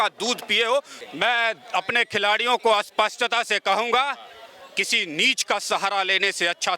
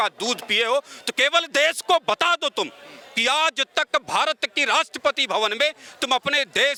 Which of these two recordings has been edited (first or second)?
first